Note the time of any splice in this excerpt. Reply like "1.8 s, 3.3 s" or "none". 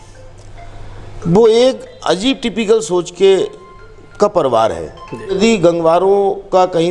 5.4 s